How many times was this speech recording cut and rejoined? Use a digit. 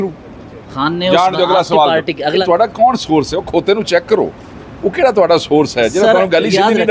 1